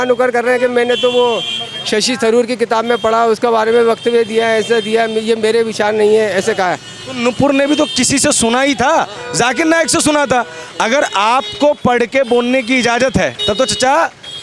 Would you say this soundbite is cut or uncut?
cut